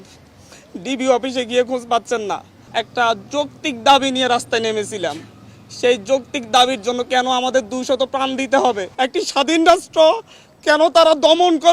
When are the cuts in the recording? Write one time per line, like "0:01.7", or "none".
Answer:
0:02.5
0:08.9